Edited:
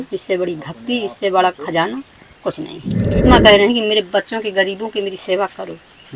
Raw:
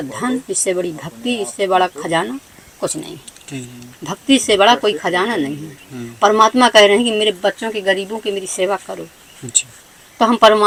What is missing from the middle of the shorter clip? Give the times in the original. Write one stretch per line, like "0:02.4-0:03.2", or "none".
0:03.6-0:06.5

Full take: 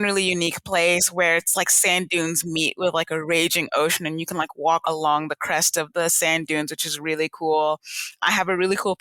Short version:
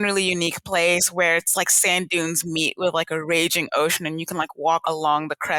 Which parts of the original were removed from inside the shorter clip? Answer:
none

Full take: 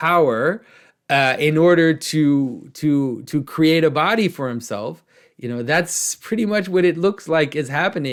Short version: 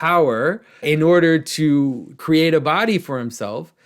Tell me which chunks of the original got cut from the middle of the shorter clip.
0:00.8-0:01.4
0:02.7-0:03.4

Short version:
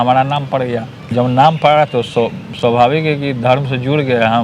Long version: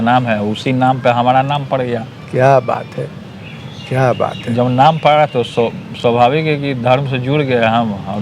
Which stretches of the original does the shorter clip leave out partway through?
0:02.2-0:04.4

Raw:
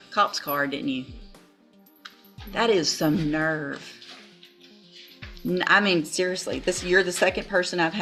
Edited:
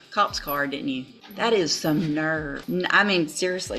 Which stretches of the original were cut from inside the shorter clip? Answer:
0:01.2-0:02.4
0:03.7-0:05.3

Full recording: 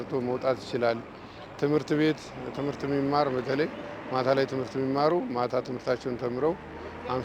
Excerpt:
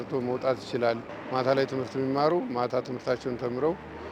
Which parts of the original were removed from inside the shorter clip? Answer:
0:01.1-0:03.9

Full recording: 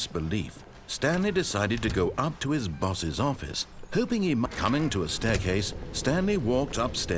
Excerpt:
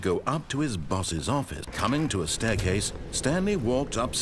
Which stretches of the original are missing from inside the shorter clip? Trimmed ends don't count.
0:03.7-0:04.6

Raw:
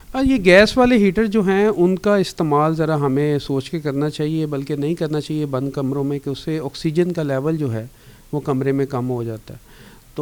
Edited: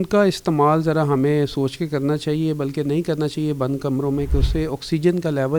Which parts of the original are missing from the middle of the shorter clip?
none

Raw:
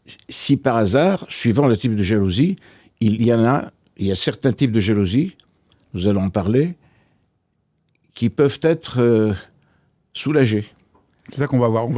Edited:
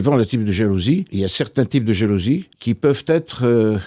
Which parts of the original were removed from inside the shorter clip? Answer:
0:02.6-0:04.0
0:05.4-0:08.1

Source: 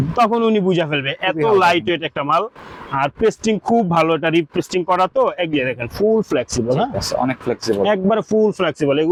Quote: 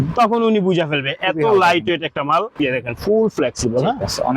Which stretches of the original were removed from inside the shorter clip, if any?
0:02.5-0:05.5

